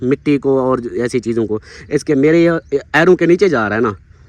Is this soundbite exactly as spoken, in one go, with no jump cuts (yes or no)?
yes